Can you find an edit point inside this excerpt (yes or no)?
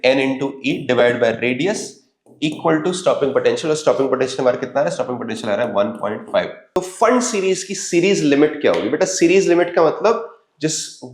yes